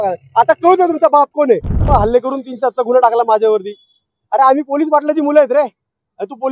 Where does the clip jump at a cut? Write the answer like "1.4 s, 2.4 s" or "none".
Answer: 1.8 s